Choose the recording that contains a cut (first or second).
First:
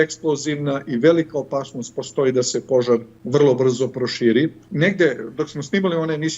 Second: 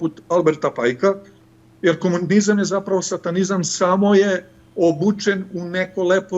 first